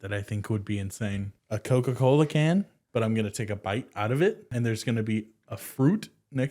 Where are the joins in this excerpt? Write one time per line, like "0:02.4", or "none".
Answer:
0:01.3
0:02.8
0:04.4